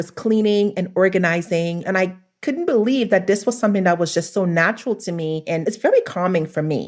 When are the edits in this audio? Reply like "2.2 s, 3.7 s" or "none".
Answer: 1.9 s, 5.6 s